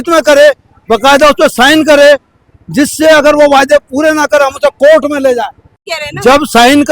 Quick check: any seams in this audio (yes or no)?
yes